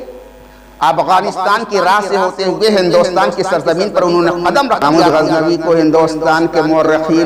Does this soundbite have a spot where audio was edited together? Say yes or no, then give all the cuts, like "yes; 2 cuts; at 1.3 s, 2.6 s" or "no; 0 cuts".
yes; 1 cut; at 4.8 s